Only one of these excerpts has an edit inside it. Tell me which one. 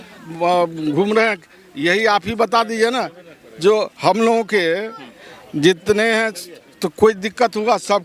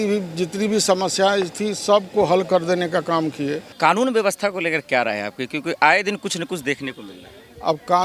second; 1 cut; at 3.7 s

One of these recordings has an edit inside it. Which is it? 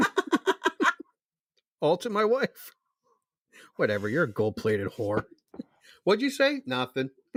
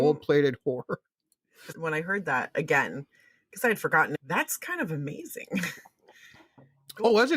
second; 2 cuts; at 1.7 s, 4.2 s

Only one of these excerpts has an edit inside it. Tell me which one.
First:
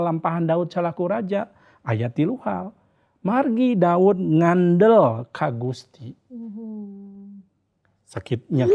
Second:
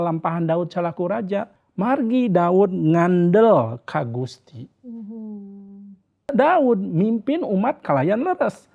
second; 2 cuts; at 1.6 s, 6.3 s

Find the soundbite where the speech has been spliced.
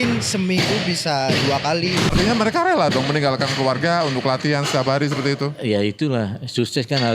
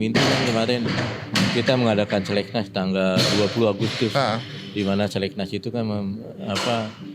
first; 1 cut; at 2.1 s

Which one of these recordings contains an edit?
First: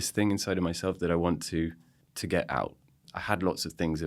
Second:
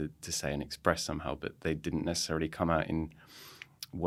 first; 1 cut; at 3.1 s

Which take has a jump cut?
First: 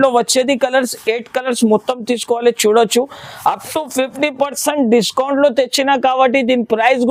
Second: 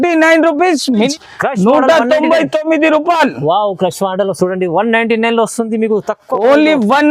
second; 1 cut; at 1.1 s

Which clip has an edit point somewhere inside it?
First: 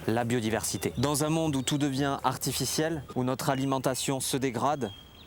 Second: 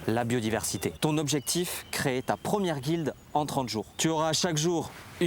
second; 2 cuts; at 0.9 s, 3.9 s

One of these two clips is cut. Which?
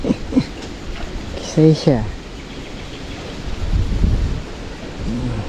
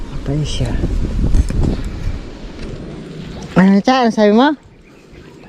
second; 1 cut; at 2.7 s

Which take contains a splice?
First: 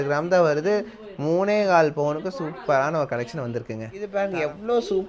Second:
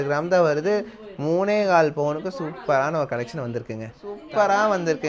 first; 1 cut; at 4.1 s

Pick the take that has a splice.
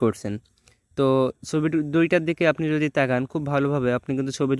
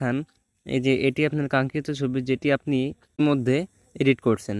second; 1 cut; at 3.2 s

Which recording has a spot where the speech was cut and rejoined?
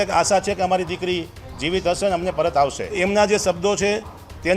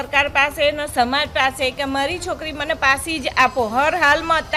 first; 1 cut; at 3.0 s

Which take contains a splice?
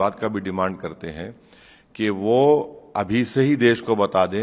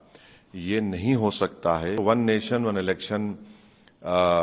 second; 1 cut; at 2.0 s

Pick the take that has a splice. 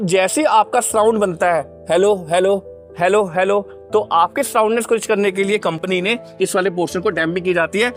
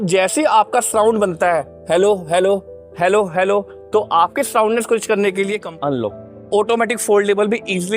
second; 1 cut; at 5.6 s

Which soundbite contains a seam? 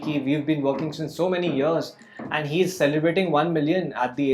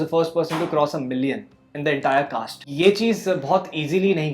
second; 1 cut; at 2.6 s

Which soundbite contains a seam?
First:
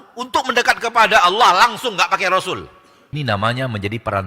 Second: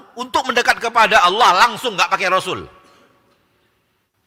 first; 1 cut; at 3.1 s

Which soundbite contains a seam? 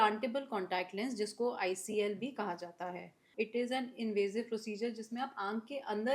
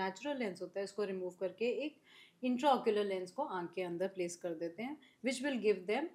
first; 1 cut; at 3.3 s

